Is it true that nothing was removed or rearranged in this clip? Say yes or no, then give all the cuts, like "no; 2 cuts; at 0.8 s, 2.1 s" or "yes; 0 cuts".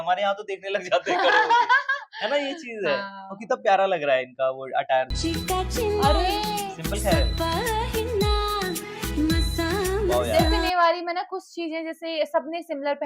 yes; 0 cuts